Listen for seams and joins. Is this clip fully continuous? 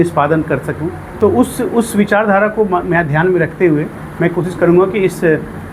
yes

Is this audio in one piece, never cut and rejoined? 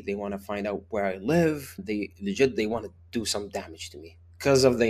no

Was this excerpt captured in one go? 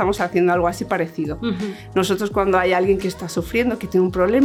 yes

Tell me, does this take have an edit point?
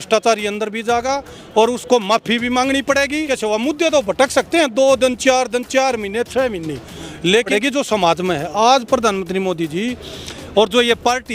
yes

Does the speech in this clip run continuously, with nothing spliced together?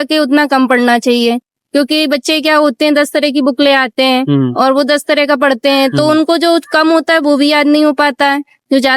yes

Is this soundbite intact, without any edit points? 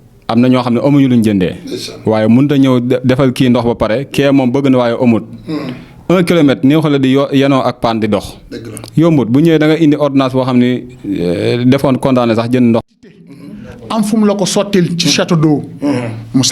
no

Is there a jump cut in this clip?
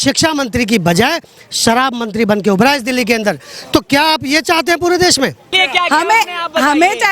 yes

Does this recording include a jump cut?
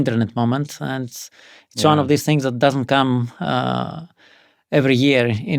no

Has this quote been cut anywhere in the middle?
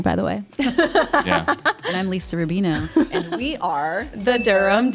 no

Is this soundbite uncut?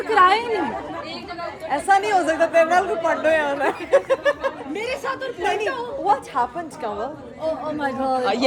yes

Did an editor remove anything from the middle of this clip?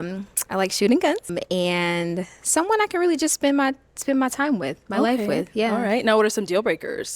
yes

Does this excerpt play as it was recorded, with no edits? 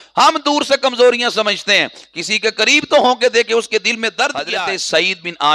no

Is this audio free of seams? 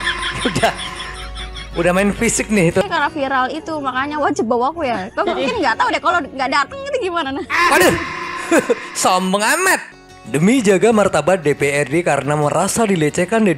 no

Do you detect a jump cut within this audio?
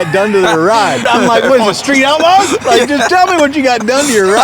yes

